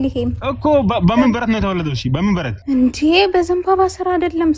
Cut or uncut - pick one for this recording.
cut